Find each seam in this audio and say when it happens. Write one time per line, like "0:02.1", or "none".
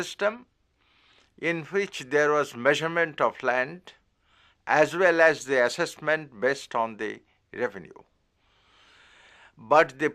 0:03.1